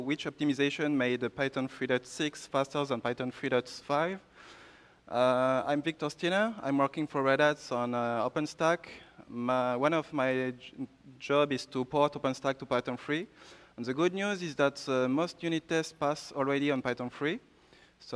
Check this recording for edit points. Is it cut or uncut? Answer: cut